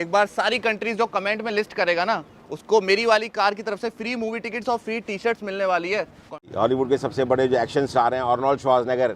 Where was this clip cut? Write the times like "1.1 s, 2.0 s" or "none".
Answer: 6.4 s